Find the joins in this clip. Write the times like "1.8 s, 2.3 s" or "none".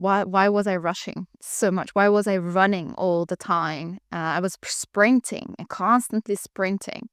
none